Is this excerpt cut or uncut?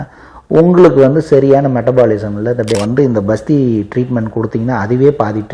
cut